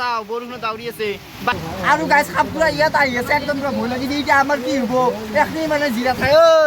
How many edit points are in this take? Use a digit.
1